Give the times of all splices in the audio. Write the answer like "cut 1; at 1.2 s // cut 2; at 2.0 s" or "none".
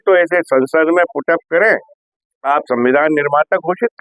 cut 1; at 1.9 s